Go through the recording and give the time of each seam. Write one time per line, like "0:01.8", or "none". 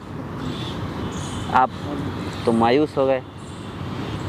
0:01.0